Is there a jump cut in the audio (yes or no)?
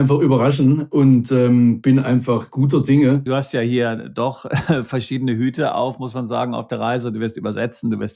yes